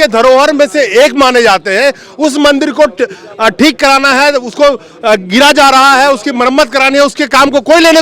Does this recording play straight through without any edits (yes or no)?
yes